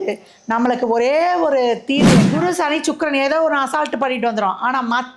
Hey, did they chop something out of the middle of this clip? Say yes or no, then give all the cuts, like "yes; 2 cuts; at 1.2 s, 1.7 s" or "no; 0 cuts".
yes; 1 cut; at 2.2 s